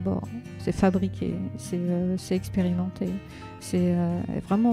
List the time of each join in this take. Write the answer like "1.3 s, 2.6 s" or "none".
none